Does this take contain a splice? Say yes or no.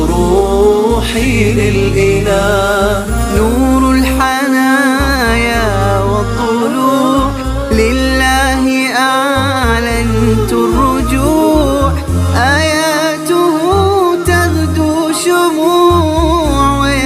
yes